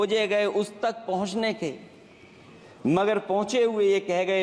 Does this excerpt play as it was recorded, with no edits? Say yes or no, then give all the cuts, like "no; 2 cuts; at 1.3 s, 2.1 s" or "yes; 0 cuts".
yes; 0 cuts